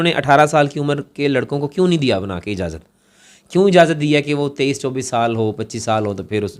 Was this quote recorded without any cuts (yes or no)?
yes